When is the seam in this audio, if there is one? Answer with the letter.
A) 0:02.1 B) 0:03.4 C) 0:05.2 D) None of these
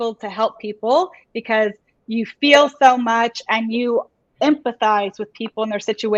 D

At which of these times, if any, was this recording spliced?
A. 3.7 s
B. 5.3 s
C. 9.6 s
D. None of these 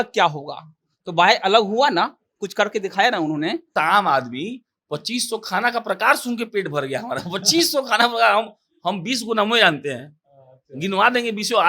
A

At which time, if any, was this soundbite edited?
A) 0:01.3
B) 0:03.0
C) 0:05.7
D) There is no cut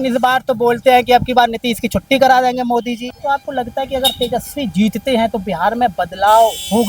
B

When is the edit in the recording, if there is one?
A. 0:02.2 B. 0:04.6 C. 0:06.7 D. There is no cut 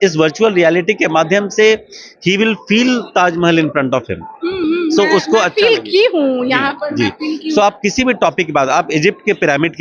D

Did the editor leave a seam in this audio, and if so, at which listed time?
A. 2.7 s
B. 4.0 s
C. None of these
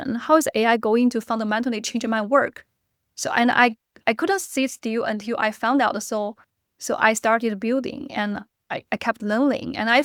C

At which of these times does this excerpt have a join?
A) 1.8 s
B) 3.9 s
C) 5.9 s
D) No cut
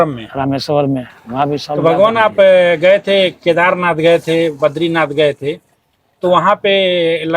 A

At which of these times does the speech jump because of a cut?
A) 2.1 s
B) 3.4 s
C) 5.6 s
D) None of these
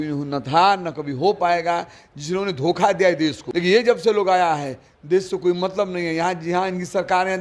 B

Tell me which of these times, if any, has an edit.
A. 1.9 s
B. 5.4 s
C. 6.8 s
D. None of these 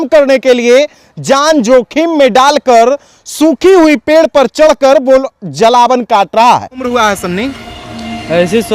C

